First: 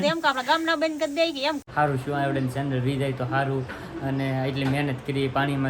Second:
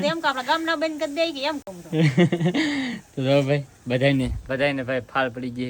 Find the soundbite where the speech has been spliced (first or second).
first